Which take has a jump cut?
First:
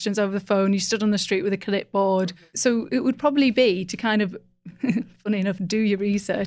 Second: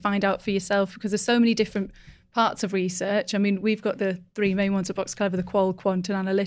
first; 1 cut; at 2.3 s

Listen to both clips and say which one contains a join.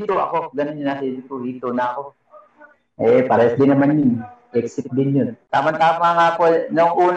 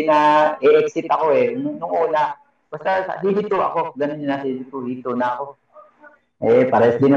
first; 1 cut; at 5.4 s

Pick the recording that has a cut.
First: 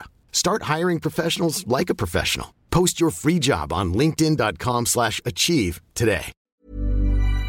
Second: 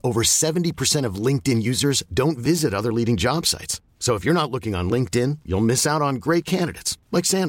first; 1 cut; at 6.5 s

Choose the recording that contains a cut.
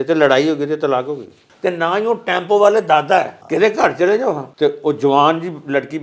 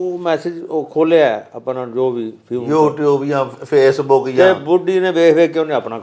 first; 3 cuts; at 1.4 s, 3.4 s, 4.5 s

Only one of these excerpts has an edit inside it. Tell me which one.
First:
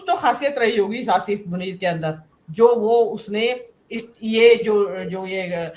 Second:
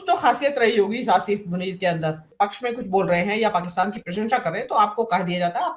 second; 1 cut; at 2.3 s

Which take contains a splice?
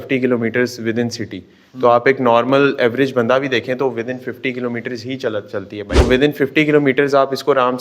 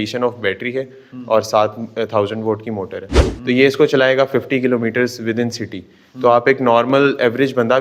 first; 1 cut; at 6.0 s

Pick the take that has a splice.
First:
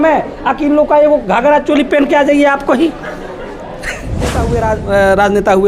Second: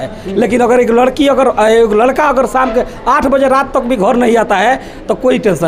first; 1 cut; at 4.4 s

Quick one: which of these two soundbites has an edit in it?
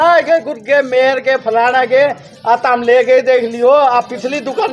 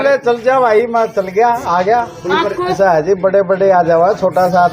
second; 1 cut; at 2.8 s

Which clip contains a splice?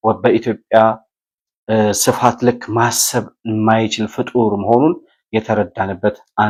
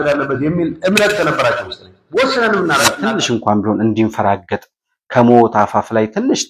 second; 1 cut; at 3.0 s

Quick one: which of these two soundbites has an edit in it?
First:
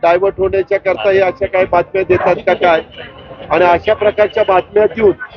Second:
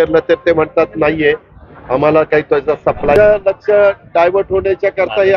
second; 1 cut; at 3.2 s

